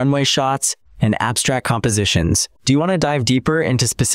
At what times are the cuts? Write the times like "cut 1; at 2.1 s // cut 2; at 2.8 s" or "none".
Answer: cut 1; at 2.5 s